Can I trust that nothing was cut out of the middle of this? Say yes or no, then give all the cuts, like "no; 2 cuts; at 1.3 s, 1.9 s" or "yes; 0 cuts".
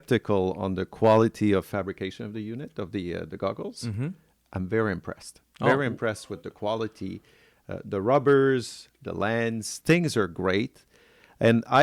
yes; 0 cuts